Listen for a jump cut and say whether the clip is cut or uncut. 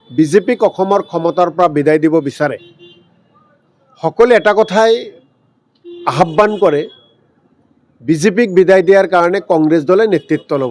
uncut